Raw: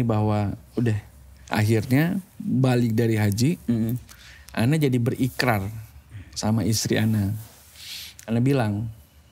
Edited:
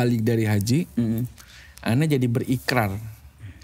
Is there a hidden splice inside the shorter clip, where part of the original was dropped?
no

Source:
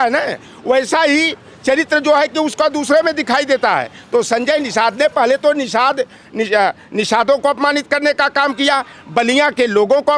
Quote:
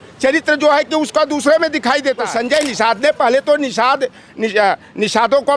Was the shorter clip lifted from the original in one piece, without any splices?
no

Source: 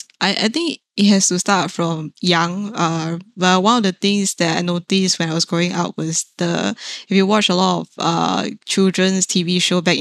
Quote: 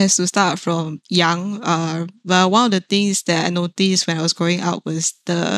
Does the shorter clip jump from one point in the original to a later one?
no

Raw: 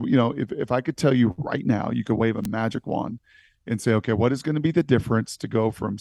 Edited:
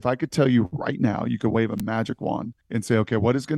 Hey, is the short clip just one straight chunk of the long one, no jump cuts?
no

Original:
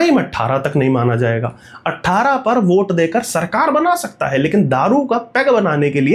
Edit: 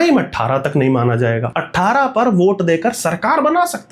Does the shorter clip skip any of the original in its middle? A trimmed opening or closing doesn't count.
yes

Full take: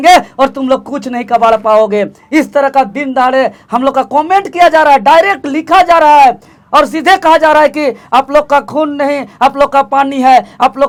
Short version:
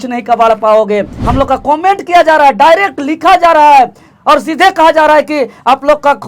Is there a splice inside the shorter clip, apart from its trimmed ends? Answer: yes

